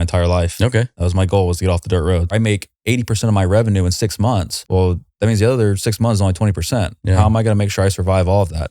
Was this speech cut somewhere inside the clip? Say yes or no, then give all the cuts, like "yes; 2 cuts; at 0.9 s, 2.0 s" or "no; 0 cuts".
yes; 2 cuts; at 2.3 s, 4.6 s